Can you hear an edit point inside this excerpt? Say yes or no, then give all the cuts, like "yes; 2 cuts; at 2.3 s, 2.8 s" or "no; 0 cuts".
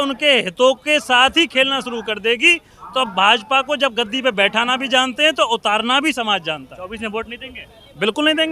no; 0 cuts